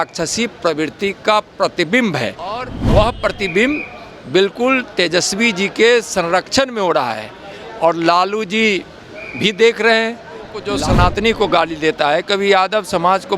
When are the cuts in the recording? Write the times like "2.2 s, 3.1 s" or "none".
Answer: 2.7 s, 10.7 s